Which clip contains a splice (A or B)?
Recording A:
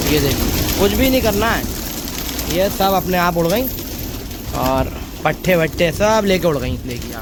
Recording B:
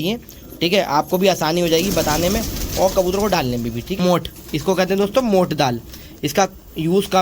B